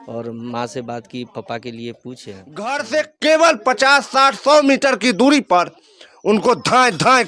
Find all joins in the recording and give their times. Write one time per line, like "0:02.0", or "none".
0:02.7